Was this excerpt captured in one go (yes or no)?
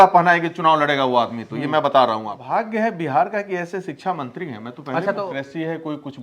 no